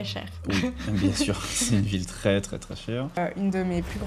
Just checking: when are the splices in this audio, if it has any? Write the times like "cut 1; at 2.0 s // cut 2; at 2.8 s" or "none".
cut 1; at 3.2 s